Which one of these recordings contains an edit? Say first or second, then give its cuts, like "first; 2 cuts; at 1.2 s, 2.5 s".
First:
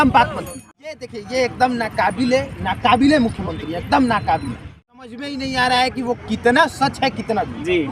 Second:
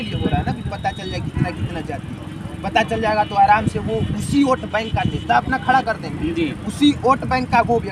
first; 2 cuts; at 1.1 s, 4.8 s